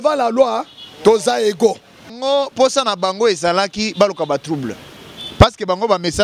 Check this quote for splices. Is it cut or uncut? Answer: cut